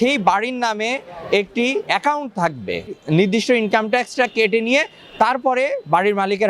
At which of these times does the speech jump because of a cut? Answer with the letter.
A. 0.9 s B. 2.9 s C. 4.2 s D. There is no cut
B